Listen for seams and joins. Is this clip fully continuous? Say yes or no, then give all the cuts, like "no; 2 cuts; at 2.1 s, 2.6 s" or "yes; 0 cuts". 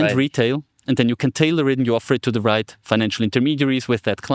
yes; 0 cuts